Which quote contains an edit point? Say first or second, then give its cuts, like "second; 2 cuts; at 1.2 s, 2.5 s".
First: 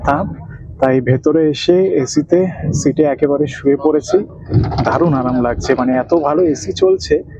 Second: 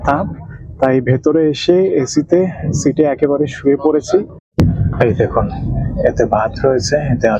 second; 1 cut; at 4.4 s